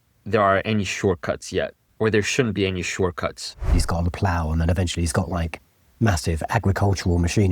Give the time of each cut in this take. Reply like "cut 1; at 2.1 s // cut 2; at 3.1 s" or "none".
cut 1; at 1.8 s // cut 2; at 3.7 s